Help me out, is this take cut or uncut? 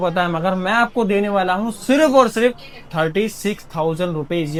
uncut